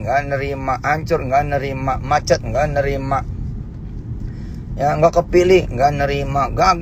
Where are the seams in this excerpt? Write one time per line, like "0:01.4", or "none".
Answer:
none